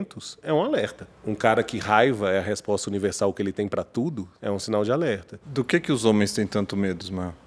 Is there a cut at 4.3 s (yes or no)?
yes